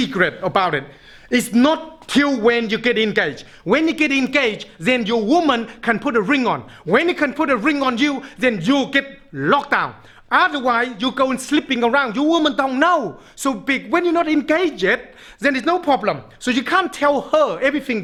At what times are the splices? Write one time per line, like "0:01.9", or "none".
none